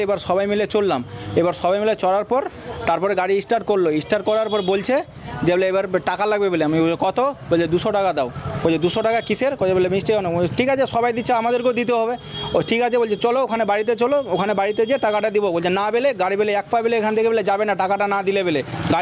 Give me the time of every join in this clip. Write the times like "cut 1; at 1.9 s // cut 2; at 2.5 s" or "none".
none